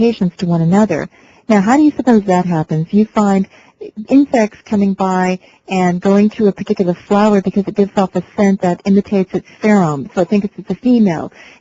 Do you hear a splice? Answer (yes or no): no